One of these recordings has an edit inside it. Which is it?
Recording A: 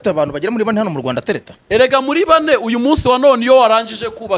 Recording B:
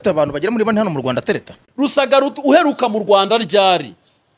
B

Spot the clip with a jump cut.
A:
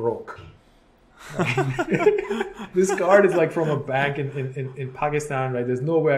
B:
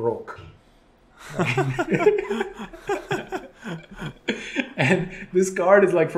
A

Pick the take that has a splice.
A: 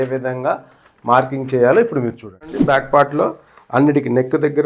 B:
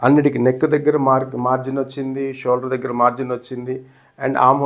A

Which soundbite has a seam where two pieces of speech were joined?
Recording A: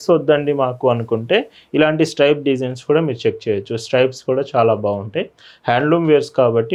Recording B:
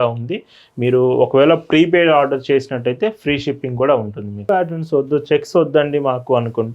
B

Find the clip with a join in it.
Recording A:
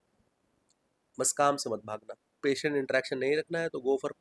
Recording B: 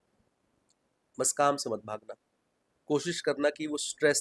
A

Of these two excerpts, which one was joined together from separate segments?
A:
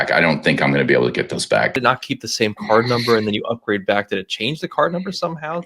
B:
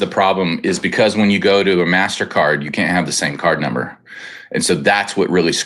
A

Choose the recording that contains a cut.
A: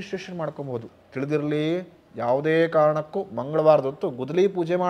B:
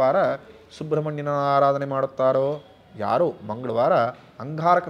A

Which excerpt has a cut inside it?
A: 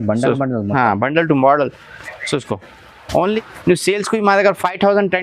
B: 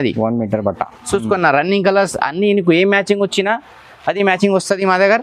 A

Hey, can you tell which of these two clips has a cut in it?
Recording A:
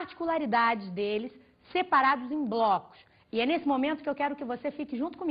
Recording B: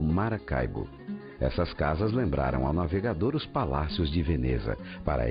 B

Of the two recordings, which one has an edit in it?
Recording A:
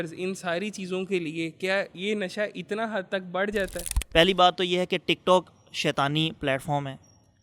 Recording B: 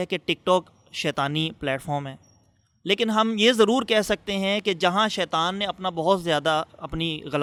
A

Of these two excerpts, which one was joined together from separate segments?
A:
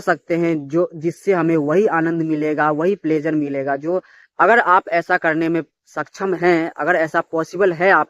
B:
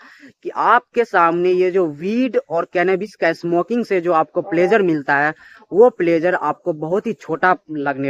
A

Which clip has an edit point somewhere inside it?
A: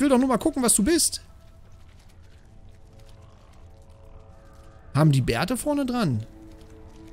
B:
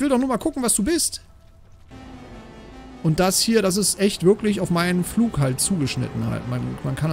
B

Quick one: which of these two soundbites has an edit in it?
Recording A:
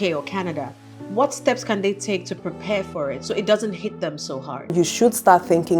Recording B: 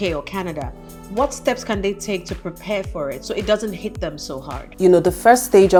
A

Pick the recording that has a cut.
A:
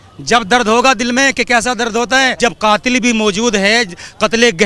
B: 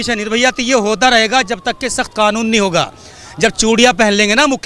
A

